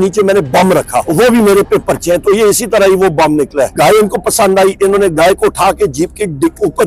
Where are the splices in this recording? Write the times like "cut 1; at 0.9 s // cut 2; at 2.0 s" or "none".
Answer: cut 1; at 1.1 s // cut 2; at 3.7 s